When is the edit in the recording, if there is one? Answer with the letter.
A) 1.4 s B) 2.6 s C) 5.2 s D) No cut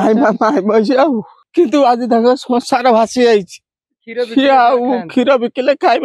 A